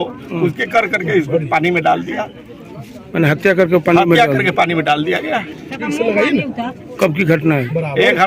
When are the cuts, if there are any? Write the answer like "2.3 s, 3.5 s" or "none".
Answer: none